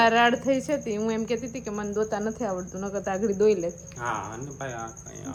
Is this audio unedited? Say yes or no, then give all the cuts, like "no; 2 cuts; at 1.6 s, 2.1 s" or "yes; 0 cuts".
yes; 0 cuts